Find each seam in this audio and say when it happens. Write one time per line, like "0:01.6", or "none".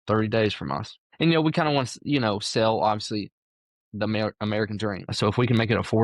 0:01.1
0:05.1